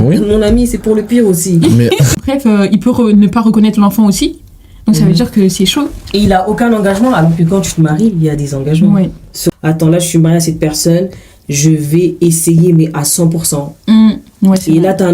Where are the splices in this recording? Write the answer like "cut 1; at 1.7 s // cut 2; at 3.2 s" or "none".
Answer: cut 1; at 2.2 s // cut 2; at 9.5 s